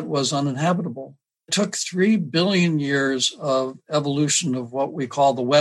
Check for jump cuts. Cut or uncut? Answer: cut